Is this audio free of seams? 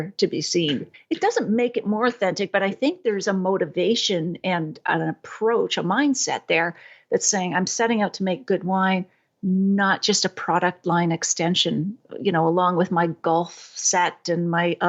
yes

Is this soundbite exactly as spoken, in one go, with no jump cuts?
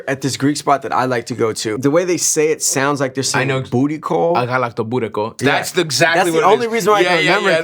no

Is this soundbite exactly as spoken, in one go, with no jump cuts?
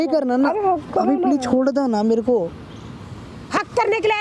yes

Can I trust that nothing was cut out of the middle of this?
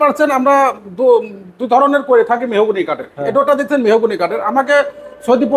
yes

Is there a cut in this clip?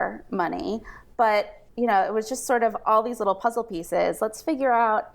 yes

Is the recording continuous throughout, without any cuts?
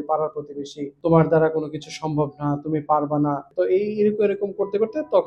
no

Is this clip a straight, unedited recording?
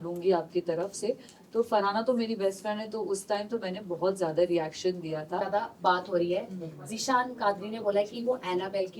no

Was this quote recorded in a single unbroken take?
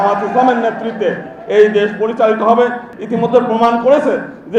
no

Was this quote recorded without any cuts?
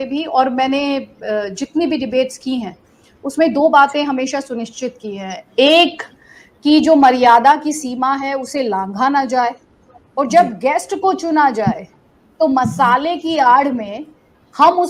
yes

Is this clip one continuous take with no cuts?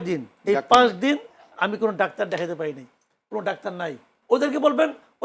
no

